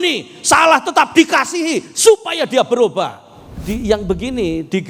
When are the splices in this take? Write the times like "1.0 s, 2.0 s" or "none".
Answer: 3.6 s